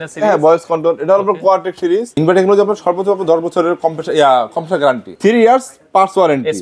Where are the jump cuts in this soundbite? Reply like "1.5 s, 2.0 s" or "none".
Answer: 2.1 s, 5.1 s

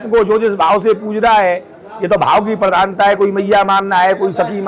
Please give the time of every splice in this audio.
none

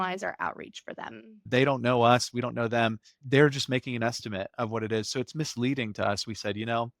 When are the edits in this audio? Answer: 1.3 s, 3.2 s

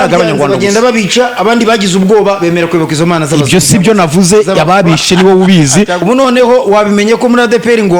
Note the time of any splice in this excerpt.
6.0 s

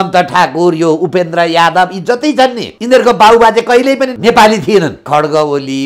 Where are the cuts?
2.7 s, 4.1 s, 5.0 s

